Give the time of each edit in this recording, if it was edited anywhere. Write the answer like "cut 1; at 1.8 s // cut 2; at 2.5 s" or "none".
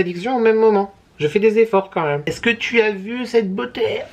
cut 1; at 2.2 s